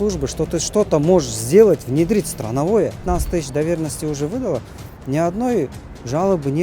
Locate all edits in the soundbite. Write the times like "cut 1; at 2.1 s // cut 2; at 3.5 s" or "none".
cut 1; at 3.0 s